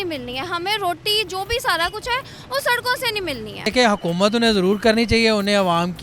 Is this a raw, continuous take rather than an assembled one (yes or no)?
no